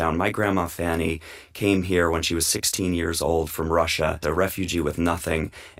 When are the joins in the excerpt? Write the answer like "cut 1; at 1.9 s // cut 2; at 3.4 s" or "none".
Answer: cut 1; at 4.2 s